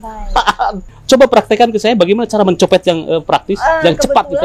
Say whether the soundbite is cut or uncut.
cut